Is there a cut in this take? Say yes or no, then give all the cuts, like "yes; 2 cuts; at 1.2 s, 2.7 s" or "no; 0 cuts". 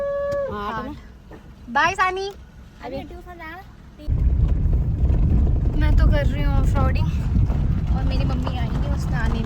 no; 0 cuts